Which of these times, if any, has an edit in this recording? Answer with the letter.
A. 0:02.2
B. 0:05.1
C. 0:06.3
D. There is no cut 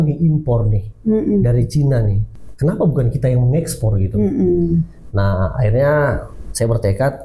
A